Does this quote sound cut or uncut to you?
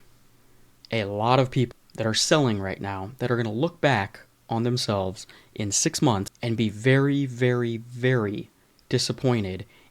cut